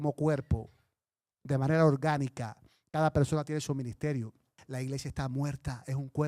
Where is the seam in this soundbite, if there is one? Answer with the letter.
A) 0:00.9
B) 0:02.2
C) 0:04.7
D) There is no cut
C